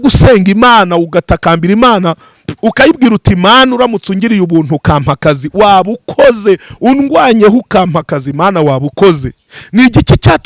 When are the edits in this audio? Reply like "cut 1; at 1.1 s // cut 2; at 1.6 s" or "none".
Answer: none